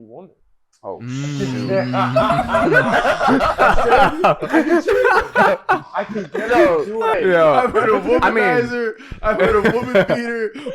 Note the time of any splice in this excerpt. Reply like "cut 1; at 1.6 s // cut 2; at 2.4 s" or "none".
cut 1; at 7.1 s

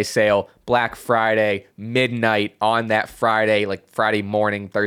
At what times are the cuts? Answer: none

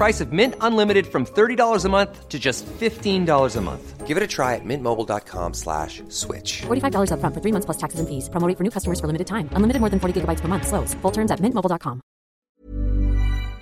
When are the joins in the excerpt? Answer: cut 1; at 12.3 s

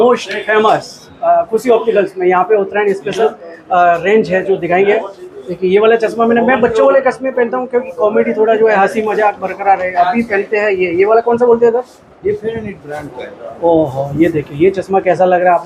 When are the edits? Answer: none

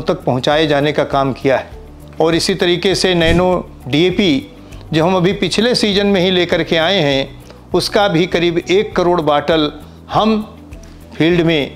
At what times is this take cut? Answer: none

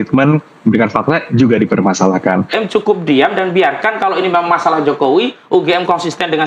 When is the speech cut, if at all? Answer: cut 1; at 2.6 s

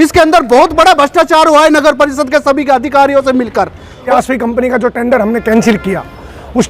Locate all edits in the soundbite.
cut 1; at 4.1 s

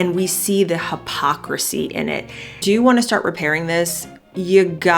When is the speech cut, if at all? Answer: cut 1; at 2.6 s

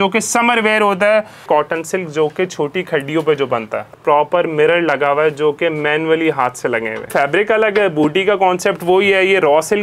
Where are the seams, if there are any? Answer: cut 1; at 1.4 s // cut 2; at 3.9 s // cut 3; at 7.1 s

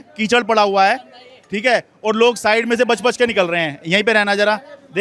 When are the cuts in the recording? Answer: none

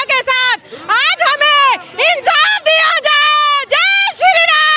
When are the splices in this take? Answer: none

